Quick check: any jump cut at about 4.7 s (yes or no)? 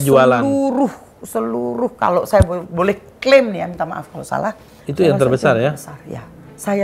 yes